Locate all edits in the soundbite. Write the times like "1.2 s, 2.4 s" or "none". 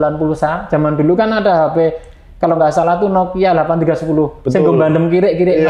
none